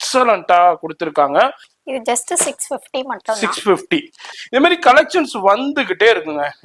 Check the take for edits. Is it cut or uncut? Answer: cut